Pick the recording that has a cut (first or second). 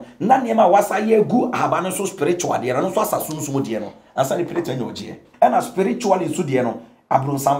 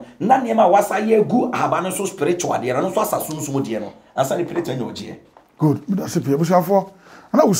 first